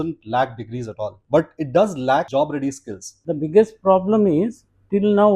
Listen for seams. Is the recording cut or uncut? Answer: cut